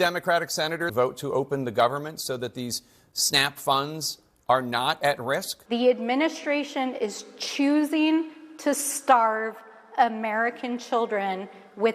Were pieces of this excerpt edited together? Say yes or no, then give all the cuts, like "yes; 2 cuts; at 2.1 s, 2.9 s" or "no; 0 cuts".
yes; 2 cuts; at 0.9 s, 5.5 s